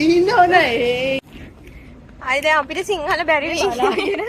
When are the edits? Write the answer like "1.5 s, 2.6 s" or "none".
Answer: 1.2 s